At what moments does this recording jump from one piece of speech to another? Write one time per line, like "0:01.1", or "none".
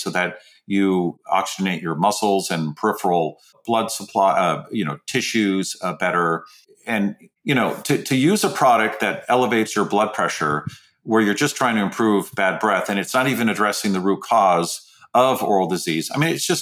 0:01.2
0:03.5
0:07.3